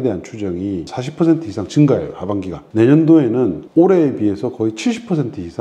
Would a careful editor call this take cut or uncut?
cut